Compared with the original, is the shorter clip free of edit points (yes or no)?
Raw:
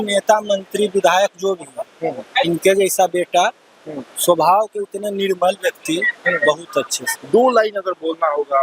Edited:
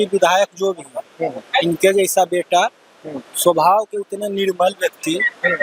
yes